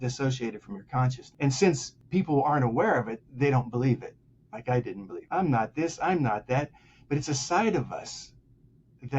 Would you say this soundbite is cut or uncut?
cut